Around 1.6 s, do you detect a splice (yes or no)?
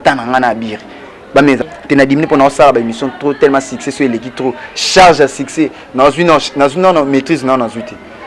yes